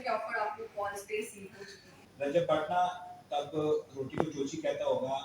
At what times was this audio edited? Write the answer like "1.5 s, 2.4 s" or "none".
2.3 s